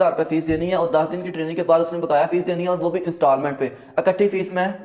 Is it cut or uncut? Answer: uncut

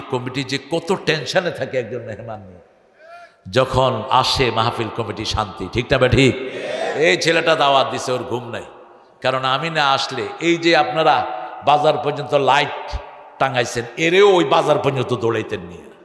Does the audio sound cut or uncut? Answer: uncut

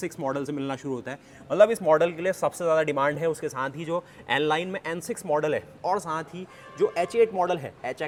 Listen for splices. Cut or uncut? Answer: uncut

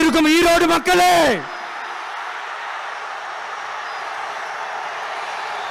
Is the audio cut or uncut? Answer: uncut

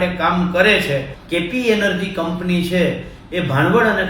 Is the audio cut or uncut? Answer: cut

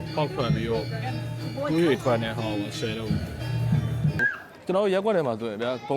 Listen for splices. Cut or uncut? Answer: cut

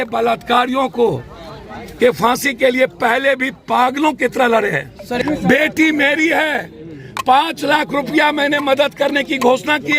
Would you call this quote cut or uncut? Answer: cut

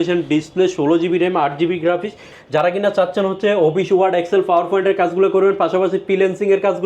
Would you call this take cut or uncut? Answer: cut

